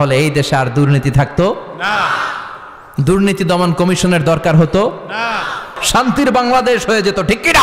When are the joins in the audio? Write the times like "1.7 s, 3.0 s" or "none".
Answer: 5.7 s